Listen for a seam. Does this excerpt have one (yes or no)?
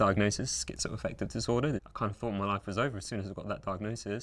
yes